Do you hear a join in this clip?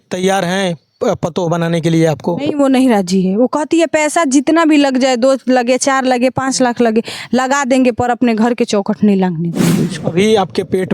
yes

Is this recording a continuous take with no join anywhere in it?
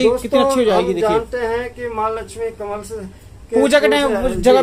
yes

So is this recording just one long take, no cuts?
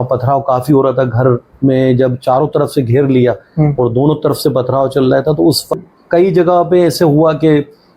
no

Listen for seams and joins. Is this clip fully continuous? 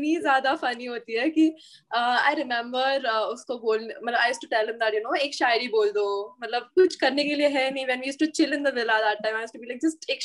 yes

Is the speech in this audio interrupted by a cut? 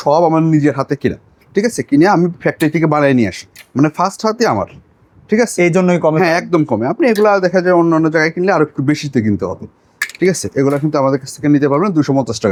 no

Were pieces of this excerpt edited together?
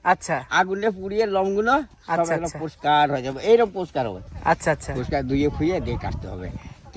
no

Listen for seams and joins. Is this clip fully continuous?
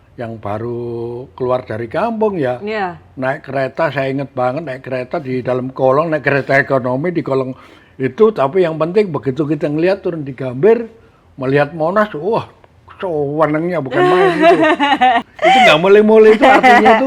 no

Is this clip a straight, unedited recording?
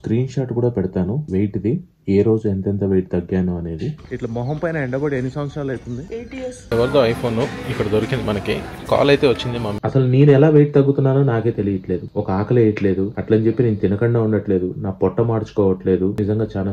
no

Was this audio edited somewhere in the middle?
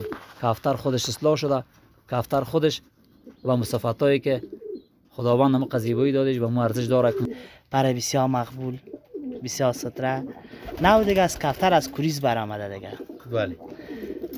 yes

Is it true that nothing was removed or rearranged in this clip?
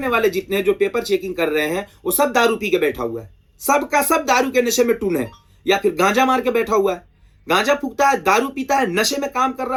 yes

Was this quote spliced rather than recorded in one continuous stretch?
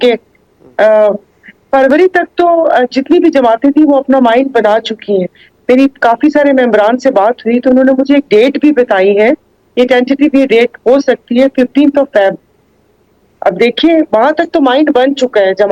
no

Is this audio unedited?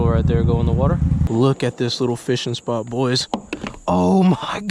no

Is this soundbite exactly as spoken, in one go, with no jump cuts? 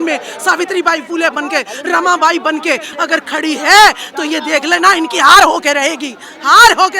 no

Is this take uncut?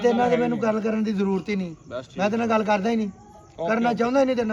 yes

